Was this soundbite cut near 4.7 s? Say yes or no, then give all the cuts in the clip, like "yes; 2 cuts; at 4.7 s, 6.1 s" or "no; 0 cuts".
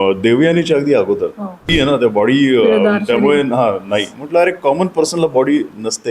no; 1 cut; at 1.7 s